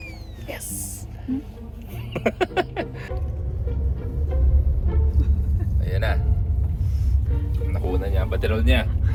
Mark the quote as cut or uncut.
uncut